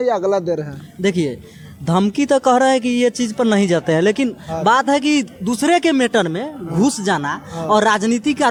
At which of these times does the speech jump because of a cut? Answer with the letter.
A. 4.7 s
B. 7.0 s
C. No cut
C